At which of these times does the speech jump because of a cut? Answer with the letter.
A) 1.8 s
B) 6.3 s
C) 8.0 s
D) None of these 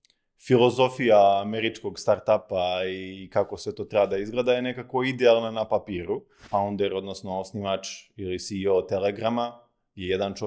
B